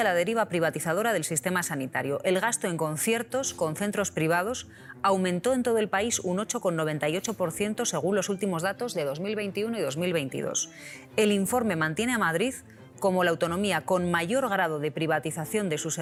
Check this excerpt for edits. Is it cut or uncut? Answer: uncut